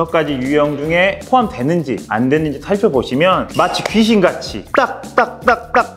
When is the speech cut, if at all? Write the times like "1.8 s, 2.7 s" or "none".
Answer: none